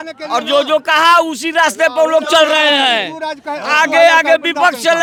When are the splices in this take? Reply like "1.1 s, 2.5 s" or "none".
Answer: none